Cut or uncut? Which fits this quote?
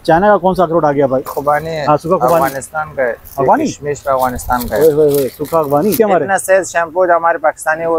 cut